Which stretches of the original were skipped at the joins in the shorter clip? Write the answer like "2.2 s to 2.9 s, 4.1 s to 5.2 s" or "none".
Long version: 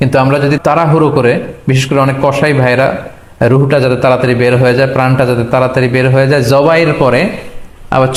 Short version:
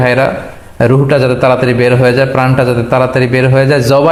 none